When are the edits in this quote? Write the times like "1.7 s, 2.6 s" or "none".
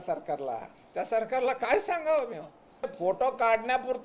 2.9 s